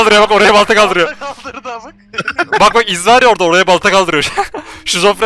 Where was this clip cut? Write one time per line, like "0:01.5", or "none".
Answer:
none